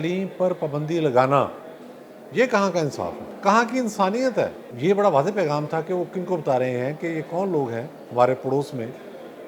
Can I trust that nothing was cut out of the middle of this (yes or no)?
no